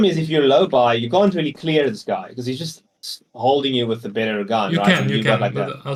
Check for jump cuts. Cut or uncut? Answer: uncut